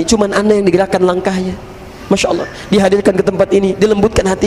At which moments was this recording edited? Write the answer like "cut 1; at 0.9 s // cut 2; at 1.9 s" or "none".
none